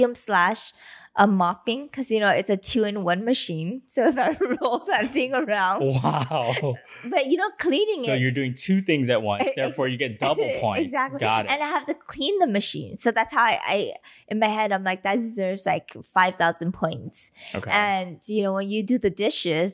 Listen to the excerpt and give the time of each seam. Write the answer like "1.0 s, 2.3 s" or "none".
none